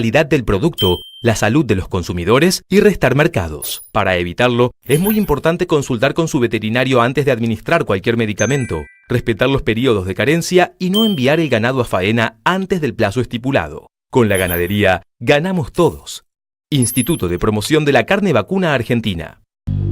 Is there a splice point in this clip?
yes; 1 cut; at 19.0 s

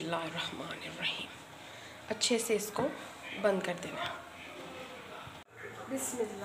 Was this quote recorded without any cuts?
no; 1 cut; at 5.3 s

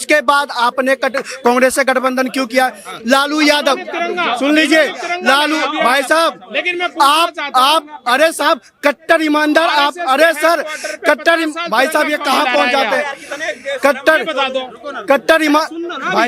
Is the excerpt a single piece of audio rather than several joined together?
yes; 0 cuts

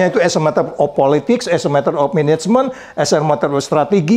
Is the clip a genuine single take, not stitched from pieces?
yes; 0 cuts

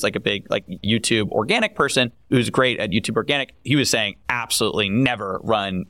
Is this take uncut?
no; 3 cuts; at 0.8 s, 2.3 s, 3.7 s

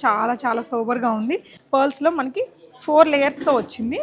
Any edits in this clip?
yes; 1 cut; at 1.5 s

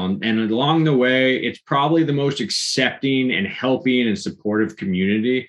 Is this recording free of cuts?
yes; 0 cuts

